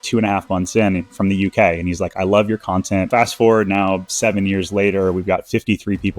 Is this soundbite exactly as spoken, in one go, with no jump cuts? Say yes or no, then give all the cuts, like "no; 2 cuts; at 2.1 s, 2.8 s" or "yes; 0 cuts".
no; 1 cut; at 3.1 s